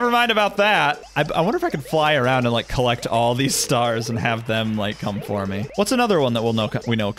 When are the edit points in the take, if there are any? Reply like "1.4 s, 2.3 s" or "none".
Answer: 1.0 s, 5.6 s